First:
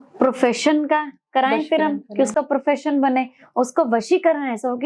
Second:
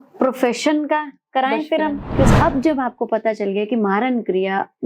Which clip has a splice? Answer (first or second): second